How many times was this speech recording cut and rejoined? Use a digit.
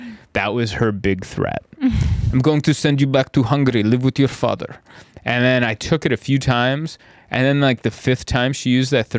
0